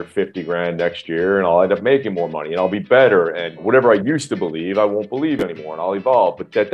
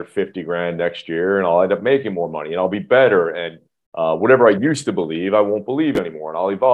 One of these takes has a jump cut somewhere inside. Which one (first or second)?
first